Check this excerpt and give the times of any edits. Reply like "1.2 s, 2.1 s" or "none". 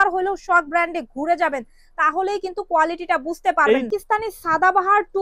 3.9 s